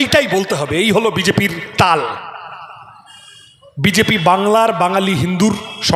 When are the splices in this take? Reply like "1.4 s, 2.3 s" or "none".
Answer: none